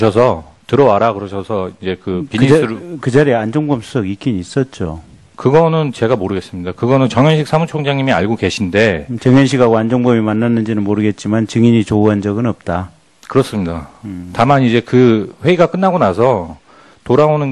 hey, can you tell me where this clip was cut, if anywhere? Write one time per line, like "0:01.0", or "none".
none